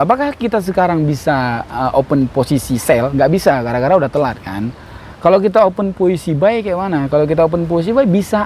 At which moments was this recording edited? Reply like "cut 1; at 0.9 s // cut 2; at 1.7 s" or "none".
none

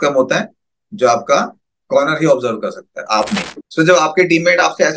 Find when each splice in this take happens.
cut 1; at 3.6 s

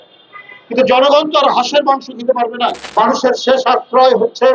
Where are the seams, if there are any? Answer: cut 1; at 2.8 s

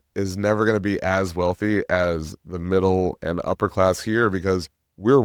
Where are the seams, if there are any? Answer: none

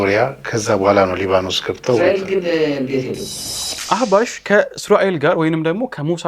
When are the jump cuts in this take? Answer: cut 1; at 3.7 s

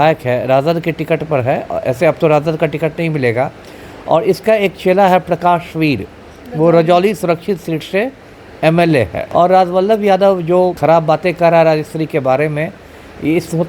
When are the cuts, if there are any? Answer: cut 1; at 9.2 s // cut 2; at 10.8 s

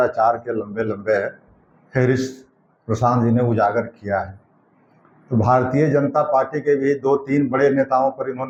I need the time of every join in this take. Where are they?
none

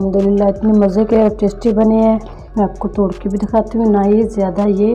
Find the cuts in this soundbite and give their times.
cut 1; at 2.4 s

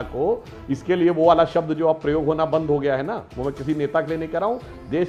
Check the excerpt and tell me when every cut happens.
none

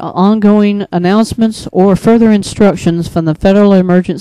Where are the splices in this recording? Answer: none

